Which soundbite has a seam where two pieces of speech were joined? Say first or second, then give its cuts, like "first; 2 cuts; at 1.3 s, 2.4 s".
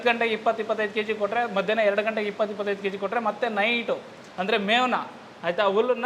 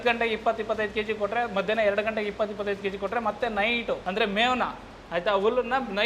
second; 1 cut; at 4.0 s